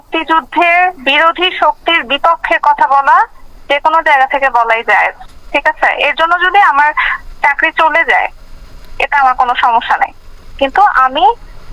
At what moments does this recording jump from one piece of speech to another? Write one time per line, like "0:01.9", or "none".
0:01.0